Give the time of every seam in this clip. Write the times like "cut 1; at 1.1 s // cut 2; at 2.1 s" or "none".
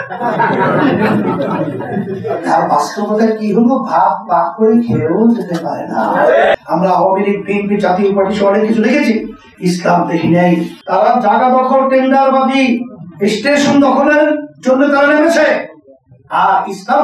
cut 1; at 6.5 s // cut 2; at 10.8 s